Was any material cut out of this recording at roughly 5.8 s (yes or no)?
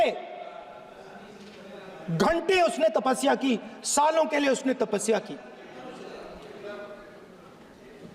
no